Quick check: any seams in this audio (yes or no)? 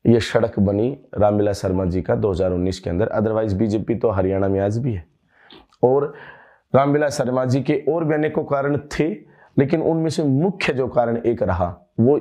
no